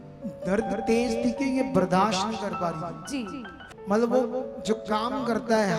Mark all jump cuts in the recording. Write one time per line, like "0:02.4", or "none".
0:03.6